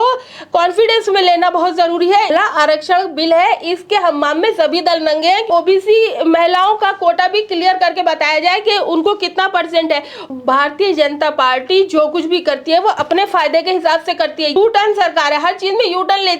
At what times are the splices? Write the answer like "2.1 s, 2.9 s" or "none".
2.3 s, 5.5 s, 10.2 s, 14.6 s